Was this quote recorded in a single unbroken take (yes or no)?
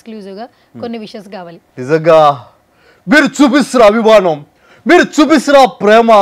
no